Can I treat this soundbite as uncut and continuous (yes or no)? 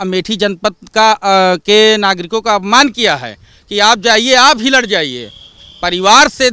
yes